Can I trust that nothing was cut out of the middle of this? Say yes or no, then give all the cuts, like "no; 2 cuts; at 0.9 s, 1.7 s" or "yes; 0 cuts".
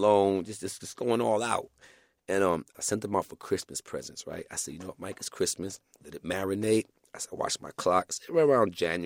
no; 1 cut; at 2.7 s